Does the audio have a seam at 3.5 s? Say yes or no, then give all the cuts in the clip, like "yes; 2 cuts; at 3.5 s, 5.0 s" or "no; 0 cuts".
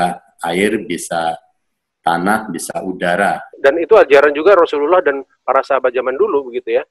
yes; 1 cut; at 3.5 s